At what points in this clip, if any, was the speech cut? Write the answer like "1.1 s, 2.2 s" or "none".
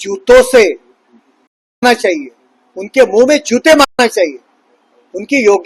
none